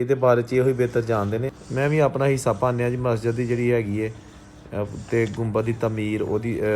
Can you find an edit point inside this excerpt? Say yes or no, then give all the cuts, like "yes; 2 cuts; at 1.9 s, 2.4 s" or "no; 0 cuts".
yes; 1 cut; at 1.6 s